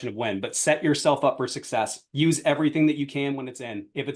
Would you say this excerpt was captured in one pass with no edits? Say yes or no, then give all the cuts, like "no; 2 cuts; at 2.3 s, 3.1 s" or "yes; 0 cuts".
yes; 0 cuts